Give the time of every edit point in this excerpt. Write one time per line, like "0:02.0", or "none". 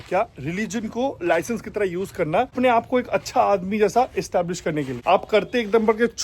0:02.5
0:04.9